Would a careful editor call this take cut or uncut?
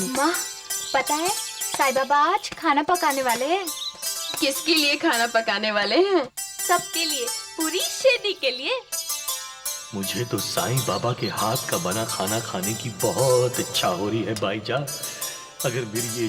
uncut